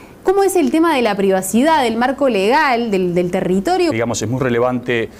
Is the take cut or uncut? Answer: uncut